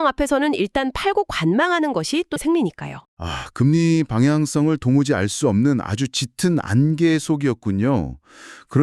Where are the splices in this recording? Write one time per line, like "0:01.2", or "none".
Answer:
0:02.4